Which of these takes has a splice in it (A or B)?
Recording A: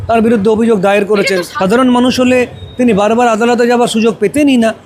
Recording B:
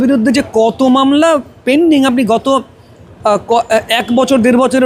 A